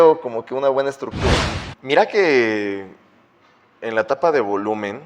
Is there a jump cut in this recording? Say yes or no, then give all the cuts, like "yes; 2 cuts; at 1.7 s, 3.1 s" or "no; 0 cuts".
yes; 1 cut; at 1.4 s